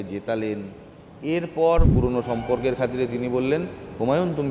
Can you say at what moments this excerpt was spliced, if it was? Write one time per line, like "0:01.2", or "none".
0:01.9